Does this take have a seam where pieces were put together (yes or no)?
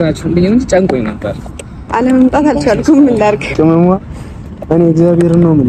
yes